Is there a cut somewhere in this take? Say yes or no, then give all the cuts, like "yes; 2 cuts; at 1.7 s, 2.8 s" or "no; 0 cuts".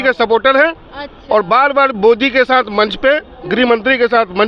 no; 0 cuts